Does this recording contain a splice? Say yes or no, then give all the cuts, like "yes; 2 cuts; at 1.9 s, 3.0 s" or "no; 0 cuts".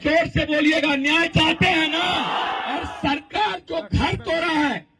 yes; 1 cut; at 2.6 s